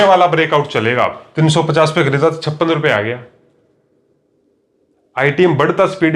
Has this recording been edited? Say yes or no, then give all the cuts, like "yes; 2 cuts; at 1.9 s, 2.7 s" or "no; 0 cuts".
yes; 1 cut; at 1.2 s